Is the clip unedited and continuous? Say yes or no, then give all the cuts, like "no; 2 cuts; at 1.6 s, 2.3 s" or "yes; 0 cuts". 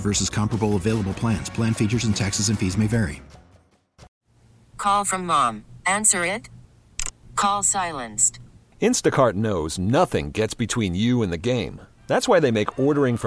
no; 1 cut; at 4.1 s